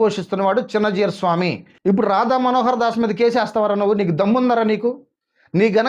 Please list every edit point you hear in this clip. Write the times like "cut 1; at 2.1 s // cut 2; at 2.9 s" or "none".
cut 1; at 1.7 s